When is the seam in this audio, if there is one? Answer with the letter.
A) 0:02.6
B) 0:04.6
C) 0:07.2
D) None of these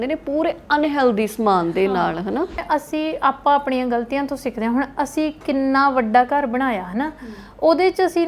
A